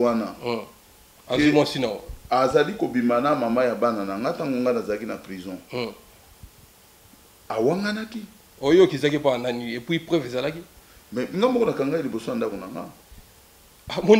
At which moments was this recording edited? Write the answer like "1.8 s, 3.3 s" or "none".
none